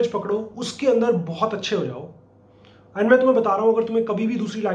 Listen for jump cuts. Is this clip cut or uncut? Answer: uncut